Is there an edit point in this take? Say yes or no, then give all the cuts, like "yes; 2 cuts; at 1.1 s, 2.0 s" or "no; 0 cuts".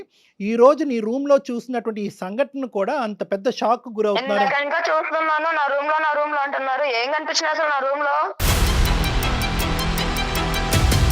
yes; 1 cut; at 8.4 s